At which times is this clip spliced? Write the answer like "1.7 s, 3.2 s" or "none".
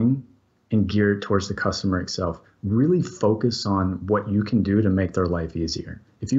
none